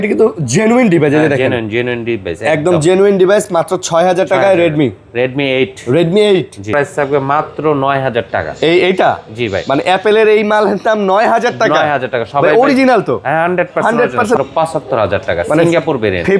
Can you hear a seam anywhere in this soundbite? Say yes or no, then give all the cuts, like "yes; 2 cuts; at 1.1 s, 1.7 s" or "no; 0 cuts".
yes; 2 cuts; at 6.7 s, 14.4 s